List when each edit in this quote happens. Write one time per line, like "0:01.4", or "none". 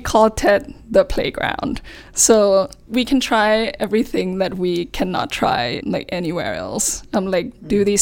0:02.8
0:05.8